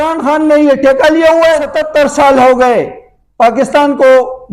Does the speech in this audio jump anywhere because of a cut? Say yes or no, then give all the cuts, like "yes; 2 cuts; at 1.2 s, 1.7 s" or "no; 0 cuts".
yes; 1 cut; at 1.8 s